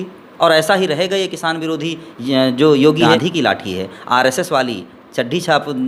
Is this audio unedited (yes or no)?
no